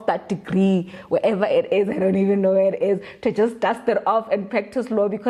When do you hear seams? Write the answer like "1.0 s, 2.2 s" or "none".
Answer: none